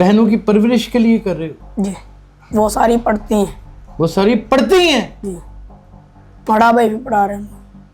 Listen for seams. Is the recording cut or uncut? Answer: uncut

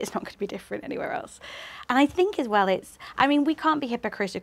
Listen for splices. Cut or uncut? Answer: uncut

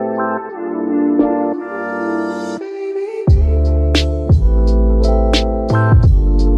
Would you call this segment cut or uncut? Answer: uncut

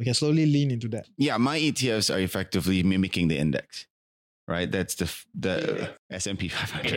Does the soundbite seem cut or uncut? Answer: cut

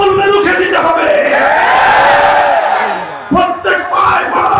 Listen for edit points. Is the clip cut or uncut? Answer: uncut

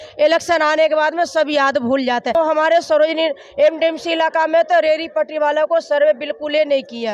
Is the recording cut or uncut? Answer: cut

